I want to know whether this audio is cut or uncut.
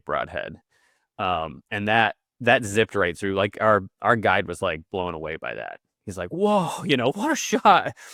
uncut